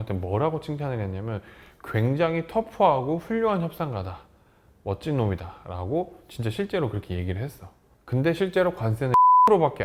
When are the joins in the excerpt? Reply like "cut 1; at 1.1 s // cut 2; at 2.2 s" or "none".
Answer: none